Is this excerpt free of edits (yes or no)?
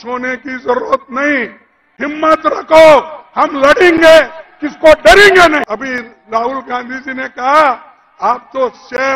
no